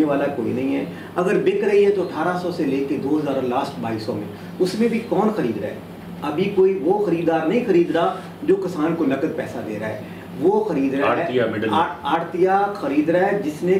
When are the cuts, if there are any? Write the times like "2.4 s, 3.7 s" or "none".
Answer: none